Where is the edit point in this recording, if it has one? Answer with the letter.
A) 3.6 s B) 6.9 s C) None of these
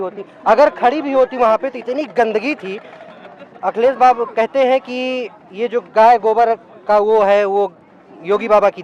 C